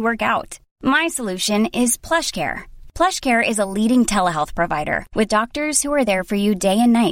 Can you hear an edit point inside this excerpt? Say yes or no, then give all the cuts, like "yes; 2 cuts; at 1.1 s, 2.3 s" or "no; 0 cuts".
no; 0 cuts